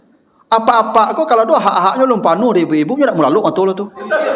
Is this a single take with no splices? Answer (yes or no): yes